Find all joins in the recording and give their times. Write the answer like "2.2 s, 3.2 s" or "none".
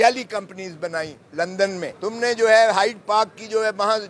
1.9 s